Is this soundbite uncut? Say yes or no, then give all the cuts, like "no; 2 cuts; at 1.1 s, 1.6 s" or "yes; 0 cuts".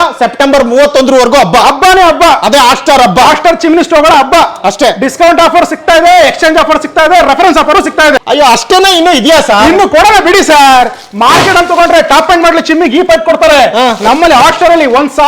no; 1 cut; at 8.2 s